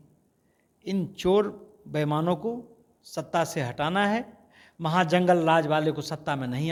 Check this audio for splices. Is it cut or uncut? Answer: uncut